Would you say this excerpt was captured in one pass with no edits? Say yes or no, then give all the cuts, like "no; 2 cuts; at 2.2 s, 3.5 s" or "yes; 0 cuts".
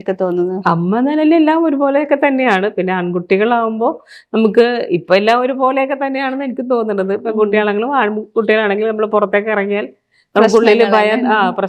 yes; 0 cuts